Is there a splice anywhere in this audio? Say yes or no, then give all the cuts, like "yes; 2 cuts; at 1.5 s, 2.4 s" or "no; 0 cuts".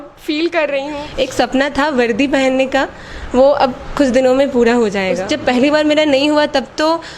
yes; 2 cuts; at 1.0 s, 5.3 s